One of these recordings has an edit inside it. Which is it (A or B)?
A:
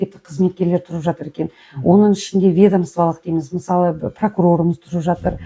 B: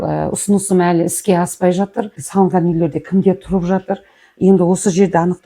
B